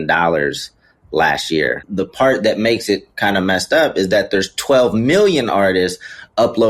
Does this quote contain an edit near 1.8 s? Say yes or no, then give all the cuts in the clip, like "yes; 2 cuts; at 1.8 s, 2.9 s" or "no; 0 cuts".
yes; 1 cut; at 1.8 s